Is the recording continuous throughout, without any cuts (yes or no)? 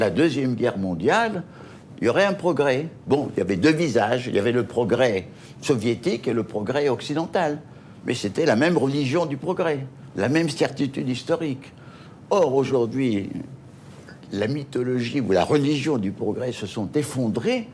no